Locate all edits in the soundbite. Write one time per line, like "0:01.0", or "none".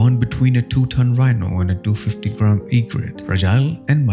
0:03.1